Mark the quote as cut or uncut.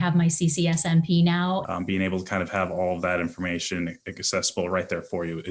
cut